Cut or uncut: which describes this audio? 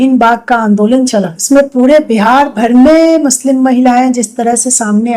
cut